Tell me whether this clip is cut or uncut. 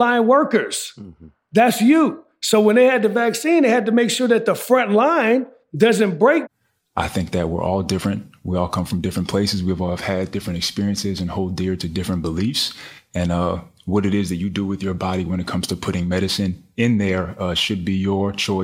cut